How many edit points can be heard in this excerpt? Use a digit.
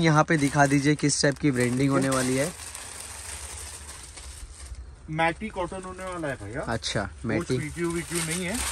0